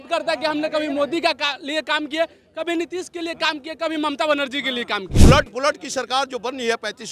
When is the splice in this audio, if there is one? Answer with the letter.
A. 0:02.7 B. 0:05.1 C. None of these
B